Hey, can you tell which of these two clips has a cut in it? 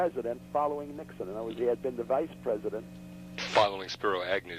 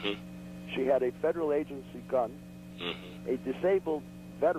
first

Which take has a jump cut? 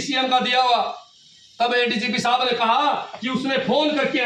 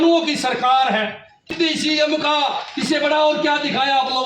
second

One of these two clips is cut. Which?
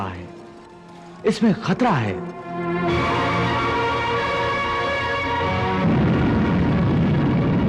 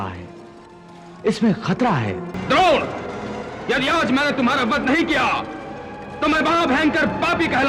second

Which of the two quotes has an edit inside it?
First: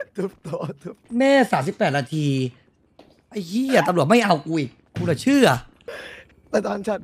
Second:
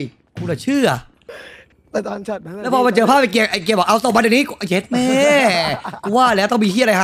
first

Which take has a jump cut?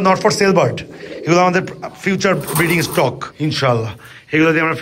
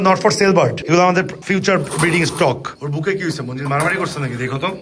second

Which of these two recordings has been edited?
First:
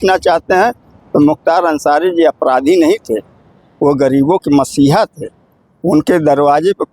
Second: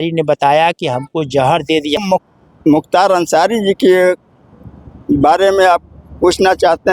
second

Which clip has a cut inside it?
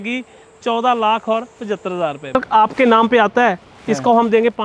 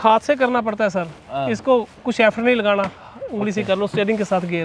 first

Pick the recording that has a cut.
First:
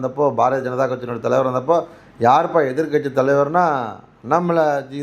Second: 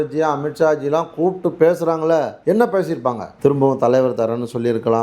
second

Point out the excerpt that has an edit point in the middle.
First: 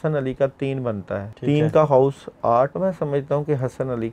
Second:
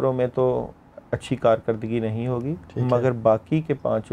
first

